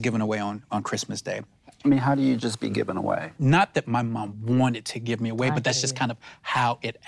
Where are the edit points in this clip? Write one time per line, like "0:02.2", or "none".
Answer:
0:01.5
0:03.3